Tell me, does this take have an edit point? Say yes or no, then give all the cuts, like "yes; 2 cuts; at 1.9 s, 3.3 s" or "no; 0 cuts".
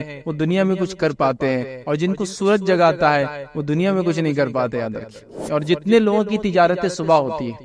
yes; 1 cut; at 5.3 s